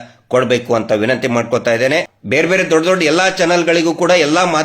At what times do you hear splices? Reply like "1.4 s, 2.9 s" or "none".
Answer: 2.2 s